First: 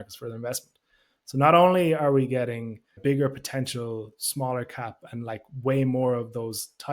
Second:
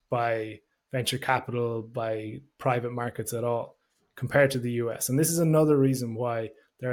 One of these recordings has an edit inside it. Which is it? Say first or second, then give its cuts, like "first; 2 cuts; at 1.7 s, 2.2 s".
first; 1 cut; at 3.0 s